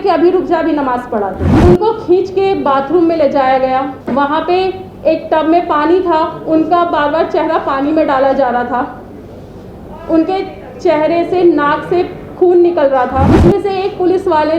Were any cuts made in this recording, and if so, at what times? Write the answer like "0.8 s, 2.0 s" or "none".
1.4 s, 4.0 s, 13.3 s

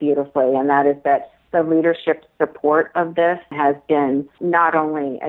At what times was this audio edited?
3.5 s, 4.3 s

